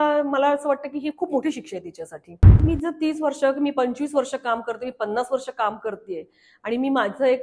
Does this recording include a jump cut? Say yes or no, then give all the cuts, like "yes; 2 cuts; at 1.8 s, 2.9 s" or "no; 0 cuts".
yes; 1 cut; at 2.6 s